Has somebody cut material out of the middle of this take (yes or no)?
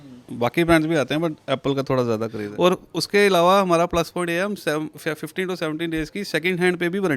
yes